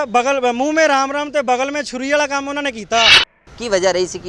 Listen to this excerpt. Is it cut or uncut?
cut